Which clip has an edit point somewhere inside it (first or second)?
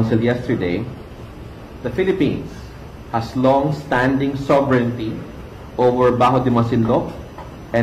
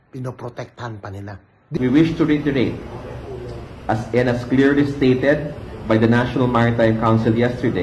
second